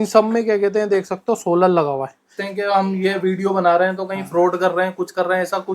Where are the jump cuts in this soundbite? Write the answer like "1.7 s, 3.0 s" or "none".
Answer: 2.4 s